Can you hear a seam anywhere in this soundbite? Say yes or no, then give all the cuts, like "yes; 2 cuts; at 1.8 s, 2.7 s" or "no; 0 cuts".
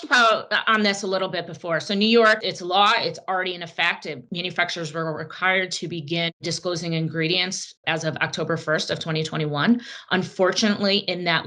yes; 1 cut; at 4.2 s